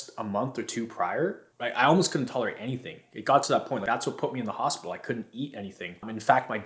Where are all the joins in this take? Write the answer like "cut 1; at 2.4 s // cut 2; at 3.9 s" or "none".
cut 1; at 1.5 s